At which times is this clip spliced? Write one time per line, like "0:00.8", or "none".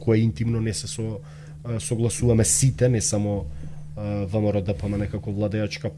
none